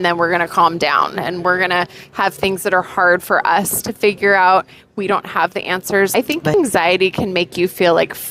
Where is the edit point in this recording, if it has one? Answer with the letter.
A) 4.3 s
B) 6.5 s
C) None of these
B